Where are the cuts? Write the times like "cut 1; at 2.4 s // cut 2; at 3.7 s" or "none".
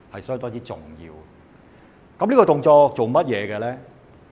none

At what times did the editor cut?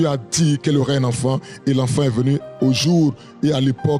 none

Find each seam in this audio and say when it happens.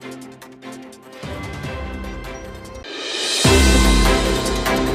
none

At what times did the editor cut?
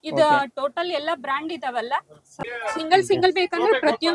cut 1; at 2.2 s

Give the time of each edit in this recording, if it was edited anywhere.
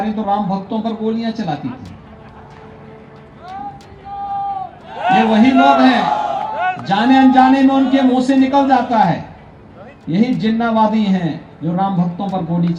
none

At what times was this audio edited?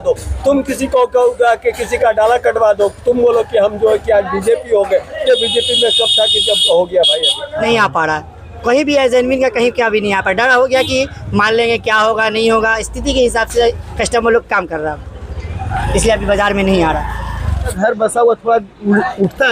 cut 1; at 7.7 s // cut 2; at 17.7 s

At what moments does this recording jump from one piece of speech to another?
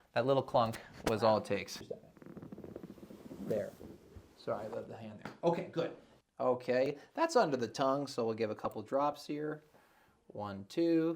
cut 1; at 1.8 s // cut 2; at 6.1 s

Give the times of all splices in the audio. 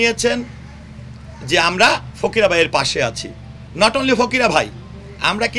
none

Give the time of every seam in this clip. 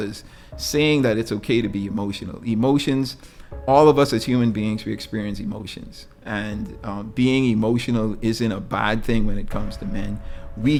none

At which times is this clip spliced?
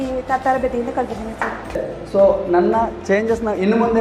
cut 1; at 1.8 s

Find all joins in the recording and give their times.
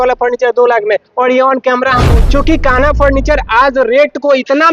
cut 1; at 2.1 s

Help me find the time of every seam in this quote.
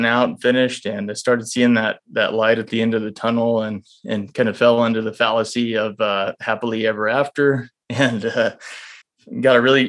none

